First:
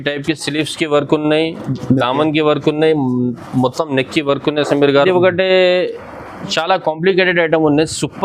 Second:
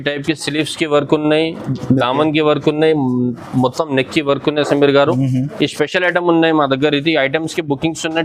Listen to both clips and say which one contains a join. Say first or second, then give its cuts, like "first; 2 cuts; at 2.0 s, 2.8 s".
first; 1 cut; at 5.0 s